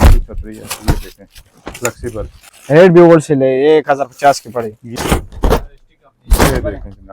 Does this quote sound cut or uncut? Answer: cut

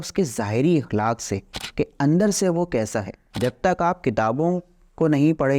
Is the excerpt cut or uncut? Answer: cut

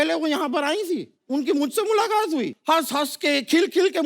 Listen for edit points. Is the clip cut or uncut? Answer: cut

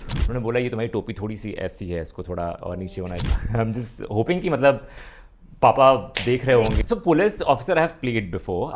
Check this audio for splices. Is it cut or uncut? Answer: cut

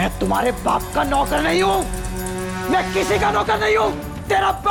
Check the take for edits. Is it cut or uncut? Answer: uncut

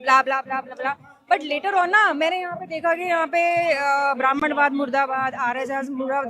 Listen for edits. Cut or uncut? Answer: uncut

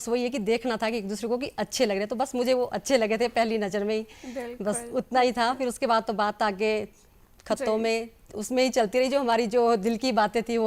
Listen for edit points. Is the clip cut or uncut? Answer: uncut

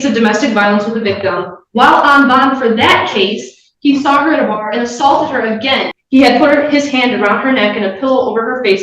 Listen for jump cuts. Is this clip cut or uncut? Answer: cut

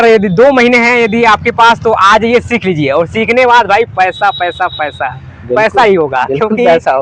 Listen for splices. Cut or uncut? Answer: uncut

